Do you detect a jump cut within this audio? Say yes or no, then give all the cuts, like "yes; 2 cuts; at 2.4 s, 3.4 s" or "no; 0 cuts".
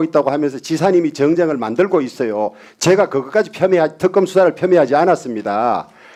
no; 0 cuts